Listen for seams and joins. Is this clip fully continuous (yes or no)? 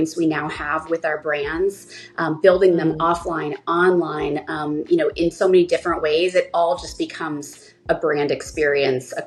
yes